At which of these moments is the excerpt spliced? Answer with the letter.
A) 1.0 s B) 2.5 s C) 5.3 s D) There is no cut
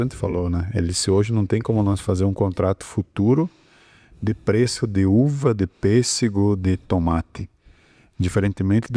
D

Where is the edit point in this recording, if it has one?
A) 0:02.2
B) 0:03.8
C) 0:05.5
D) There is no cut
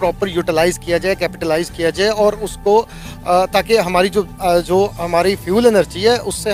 D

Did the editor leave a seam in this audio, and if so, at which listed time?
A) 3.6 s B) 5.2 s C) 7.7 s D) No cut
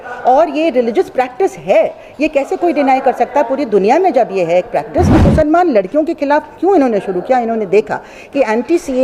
B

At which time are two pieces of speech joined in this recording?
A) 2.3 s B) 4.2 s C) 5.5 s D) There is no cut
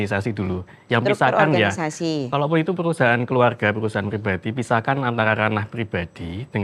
D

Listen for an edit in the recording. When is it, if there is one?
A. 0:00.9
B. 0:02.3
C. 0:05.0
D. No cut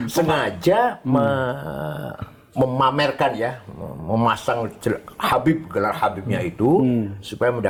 D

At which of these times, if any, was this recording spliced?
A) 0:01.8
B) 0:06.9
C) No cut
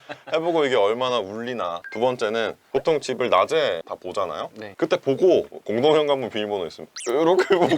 A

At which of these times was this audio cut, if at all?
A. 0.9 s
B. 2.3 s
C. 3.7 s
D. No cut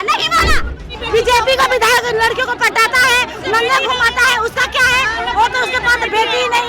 A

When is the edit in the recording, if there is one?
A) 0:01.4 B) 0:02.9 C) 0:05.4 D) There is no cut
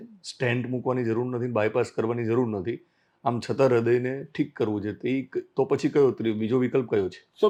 D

